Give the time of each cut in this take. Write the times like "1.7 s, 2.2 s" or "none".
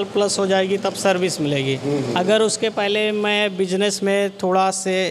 none